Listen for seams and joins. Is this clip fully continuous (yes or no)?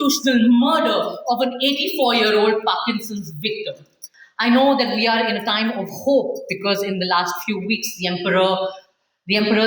no